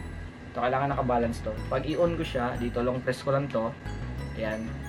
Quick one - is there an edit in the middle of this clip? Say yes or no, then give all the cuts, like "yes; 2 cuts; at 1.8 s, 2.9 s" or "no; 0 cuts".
no; 0 cuts